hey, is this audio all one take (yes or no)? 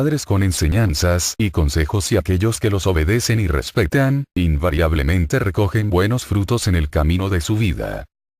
no